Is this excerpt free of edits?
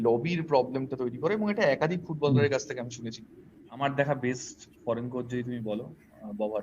no; 1 cut; at 3.8 s

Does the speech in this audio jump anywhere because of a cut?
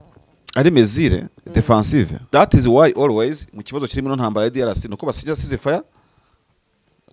yes; 1 cut; at 2.2 s

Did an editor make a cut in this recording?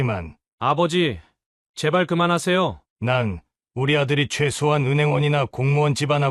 yes; 1 cut; at 2.9 s

